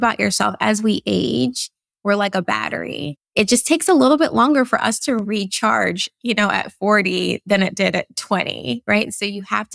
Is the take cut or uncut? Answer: cut